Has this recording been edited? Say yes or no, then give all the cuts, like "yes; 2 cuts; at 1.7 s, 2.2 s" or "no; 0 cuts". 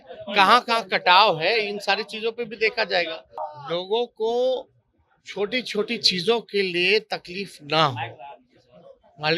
yes; 1 cut; at 3.5 s